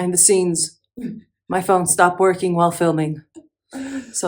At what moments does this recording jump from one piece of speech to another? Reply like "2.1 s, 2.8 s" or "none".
none